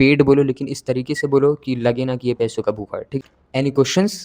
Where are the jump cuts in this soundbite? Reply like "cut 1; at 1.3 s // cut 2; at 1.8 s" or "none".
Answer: cut 1; at 3.1 s